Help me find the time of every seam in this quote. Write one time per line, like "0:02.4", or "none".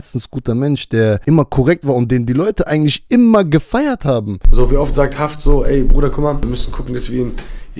0:01.2
0:04.4
0:06.4